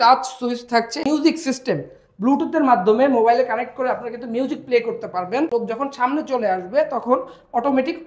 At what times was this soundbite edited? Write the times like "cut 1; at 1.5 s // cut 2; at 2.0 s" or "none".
cut 1; at 1.0 s // cut 2; at 5.5 s